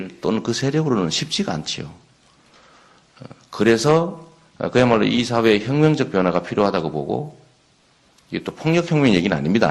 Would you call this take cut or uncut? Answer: cut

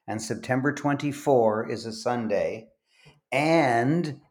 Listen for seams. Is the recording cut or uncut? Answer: uncut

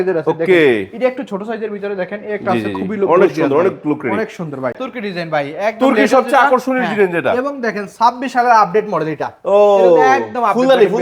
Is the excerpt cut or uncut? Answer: cut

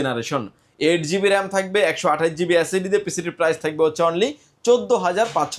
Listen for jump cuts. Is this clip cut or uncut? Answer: uncut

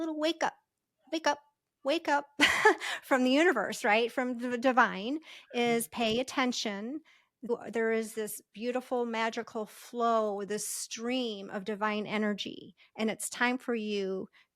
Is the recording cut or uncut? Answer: cut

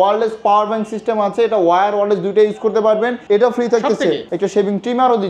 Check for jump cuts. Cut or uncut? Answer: cut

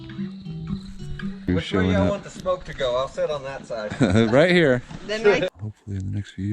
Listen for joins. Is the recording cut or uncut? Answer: cut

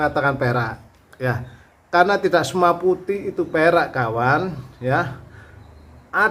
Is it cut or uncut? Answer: uncut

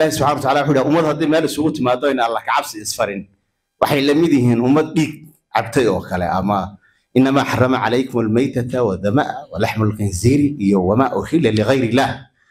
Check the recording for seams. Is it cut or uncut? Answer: uncut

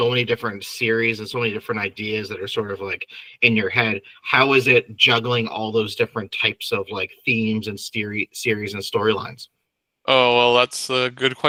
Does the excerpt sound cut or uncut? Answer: uncut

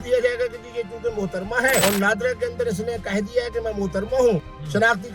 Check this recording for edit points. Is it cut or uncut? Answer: cut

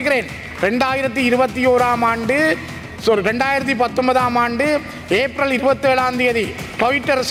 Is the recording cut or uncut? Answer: uncut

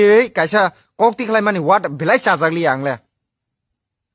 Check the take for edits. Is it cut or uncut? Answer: uncut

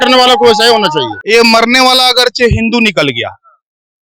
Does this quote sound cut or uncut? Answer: cut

